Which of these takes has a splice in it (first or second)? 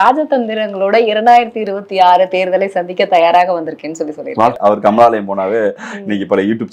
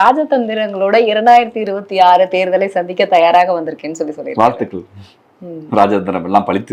first